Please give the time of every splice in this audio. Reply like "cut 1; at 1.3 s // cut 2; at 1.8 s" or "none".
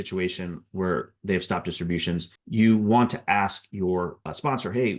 none